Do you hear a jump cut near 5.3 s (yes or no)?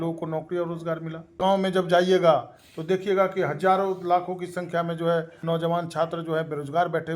yes